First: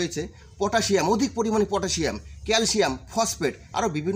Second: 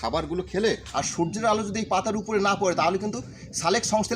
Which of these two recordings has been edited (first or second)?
second